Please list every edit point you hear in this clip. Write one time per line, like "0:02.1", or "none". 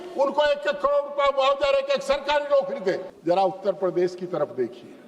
0:03.1